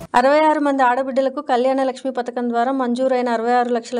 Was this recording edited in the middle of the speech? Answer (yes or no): no